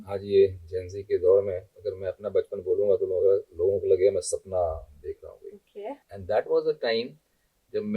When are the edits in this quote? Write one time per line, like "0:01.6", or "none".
0:06.0